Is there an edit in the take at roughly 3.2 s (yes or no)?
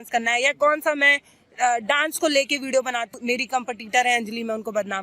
yes